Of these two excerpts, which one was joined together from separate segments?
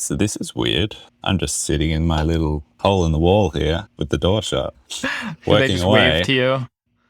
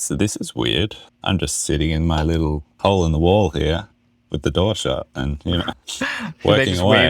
first; 2 cuts; at 3.9 s, 4.8 s

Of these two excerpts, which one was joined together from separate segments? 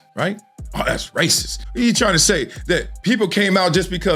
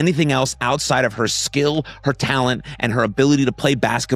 first; 1 cut; at 1.6 s

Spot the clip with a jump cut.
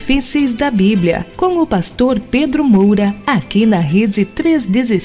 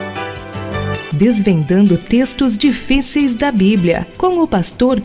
first; 1 cut; at 3.2 s

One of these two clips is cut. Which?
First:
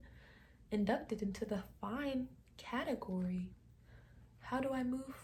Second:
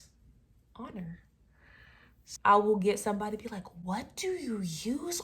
second; 1 cut; at 2.3 s

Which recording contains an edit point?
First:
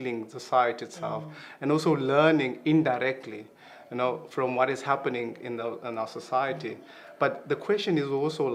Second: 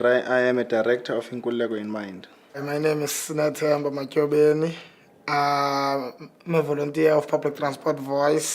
second; 1 cut; at 3.6 s

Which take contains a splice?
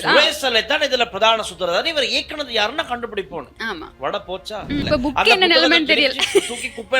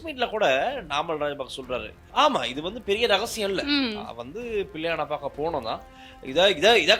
first; 1 cut; at 4.8 s

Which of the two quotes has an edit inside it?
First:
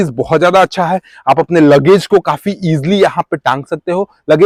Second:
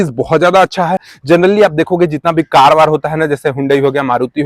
second; 1 cut; at 1.1 s

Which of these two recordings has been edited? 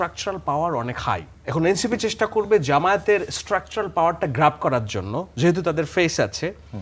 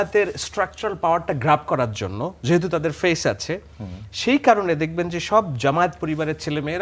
first; 1 cut; at 1.3 s

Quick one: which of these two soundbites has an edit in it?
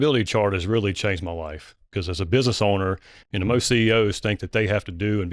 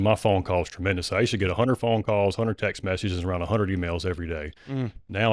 first; 1 cut; at 1.8 s

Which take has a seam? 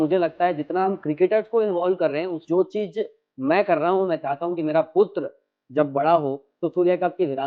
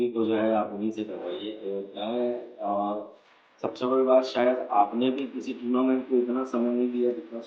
first; 1 cut; at 2.4 s

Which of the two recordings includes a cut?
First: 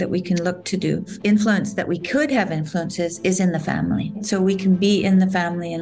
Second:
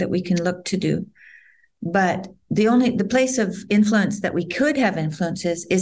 first; 2 cuts; at 1.1 s, 4.2 s

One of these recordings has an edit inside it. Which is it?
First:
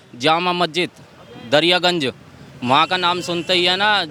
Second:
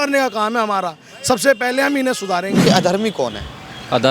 second; 1 cut; at 2.6 s

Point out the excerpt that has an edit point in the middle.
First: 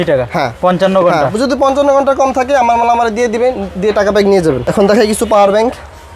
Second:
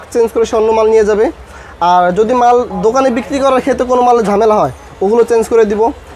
first; 1 cut; at 4.6 s

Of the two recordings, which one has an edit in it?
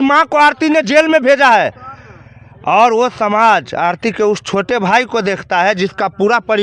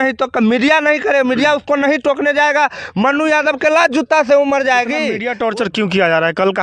second; 1 cut; at 5.2 s

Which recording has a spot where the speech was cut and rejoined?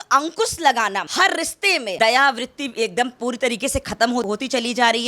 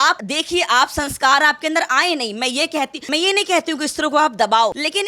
first; 1 cut; at 2.0 s

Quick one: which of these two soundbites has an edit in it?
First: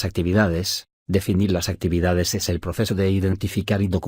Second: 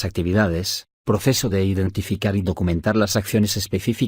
second; 1 cut; at 1.1 s

